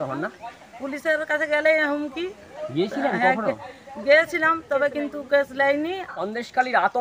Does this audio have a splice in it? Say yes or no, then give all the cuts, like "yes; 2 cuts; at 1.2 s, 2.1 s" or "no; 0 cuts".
yes; 1 cut; at 6.1 s